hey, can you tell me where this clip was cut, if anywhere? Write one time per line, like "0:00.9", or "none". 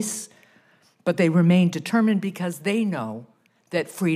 0:01.0